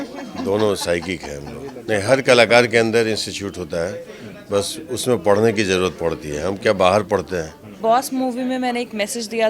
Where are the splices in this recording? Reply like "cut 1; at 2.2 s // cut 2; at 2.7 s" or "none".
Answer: cut 1; at 1.8 s // cut 2; at 7.8 s